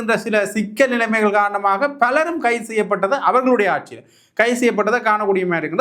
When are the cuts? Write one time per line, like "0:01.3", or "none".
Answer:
none